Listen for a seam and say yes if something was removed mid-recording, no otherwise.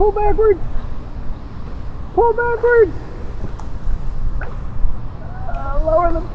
no